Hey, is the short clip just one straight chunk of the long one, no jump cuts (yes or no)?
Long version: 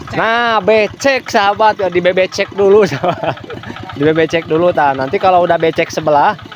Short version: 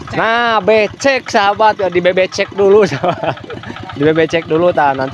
yes